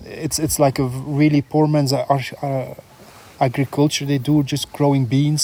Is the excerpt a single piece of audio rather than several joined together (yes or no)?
yes